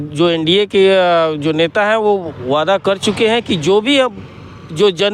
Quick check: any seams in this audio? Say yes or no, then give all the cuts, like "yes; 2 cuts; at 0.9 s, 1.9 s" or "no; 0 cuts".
no; 0 cuts